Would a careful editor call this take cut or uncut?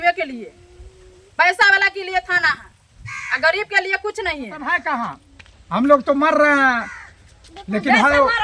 cut